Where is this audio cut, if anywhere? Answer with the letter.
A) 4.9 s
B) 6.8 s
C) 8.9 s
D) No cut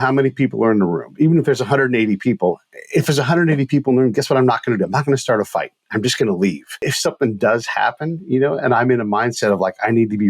B